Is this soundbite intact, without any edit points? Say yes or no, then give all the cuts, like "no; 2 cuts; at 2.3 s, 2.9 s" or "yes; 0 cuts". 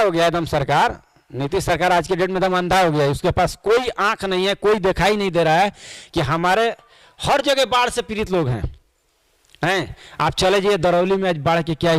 yes; 0 cuts